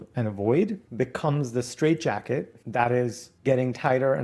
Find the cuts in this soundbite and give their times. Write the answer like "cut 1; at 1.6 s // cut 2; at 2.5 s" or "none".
cut 1; at 0.8 s // cut 2; at 2.6 s // cut 3; at 3.3 s